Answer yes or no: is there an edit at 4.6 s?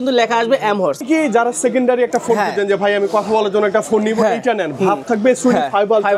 no